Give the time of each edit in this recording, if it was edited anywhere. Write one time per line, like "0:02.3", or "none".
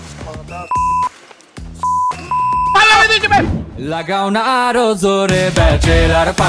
0:03.5

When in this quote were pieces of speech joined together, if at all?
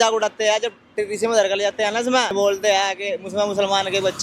0:02.3

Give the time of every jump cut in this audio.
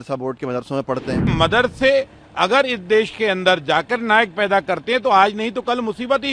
0:01.3

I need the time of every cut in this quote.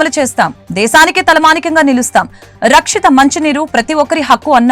none

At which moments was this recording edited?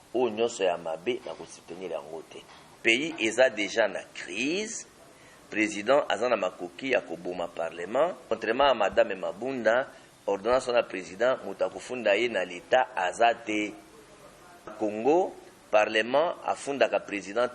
0:02.6
0:08.2
0:14.7

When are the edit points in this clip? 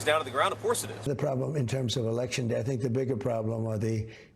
0:01.1
0:02.6

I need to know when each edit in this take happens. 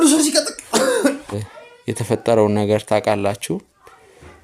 0:01.5

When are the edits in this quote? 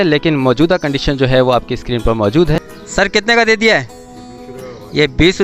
0:02.5

